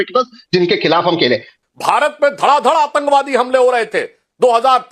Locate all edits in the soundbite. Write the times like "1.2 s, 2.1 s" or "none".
1.6 s

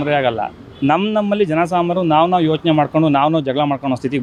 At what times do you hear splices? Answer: none

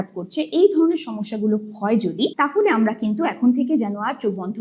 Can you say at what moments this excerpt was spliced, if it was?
2.3 s

